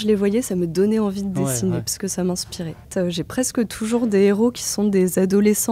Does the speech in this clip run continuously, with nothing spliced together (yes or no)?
no